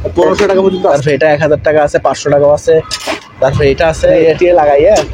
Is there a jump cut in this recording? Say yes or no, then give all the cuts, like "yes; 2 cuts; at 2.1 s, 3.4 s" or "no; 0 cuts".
yes; 2 cuts; at 0.9 s, 4.2 s